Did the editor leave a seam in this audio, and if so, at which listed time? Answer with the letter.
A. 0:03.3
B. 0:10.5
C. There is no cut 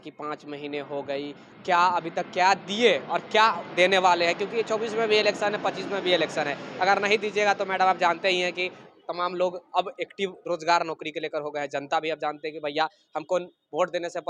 C